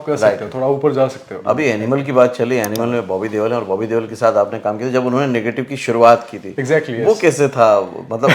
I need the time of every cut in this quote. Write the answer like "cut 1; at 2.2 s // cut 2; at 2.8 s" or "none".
cut 1; at 1.3 s